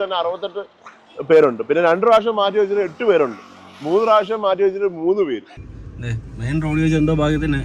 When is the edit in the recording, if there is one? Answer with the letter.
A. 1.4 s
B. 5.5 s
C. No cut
B